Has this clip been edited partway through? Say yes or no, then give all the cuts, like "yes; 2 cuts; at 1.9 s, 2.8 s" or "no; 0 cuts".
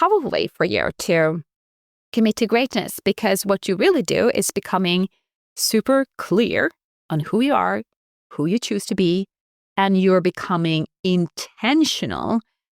no; 0 cuts